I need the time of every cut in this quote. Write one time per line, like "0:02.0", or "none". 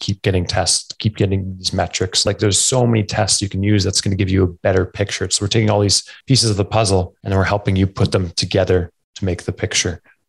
0:02.2
0:06.1
0:07.2